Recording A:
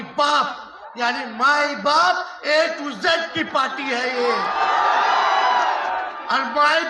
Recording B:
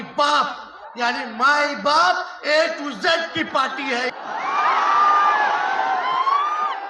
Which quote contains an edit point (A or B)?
B